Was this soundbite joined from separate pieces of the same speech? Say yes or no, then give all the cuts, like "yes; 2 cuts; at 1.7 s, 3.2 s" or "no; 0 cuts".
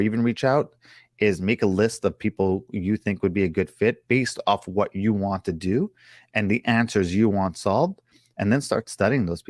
no; 0 cuts